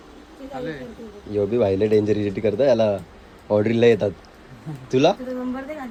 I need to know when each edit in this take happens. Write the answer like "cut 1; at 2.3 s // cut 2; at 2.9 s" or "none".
none